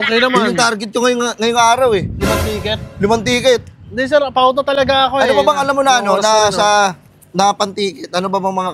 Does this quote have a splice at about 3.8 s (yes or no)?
no